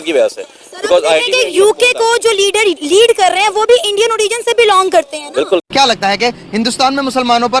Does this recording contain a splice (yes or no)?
yes